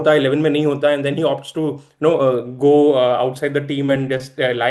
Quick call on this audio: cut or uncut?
uncut